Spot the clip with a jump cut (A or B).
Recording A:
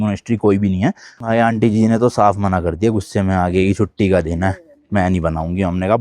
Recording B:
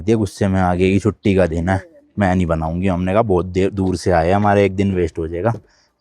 A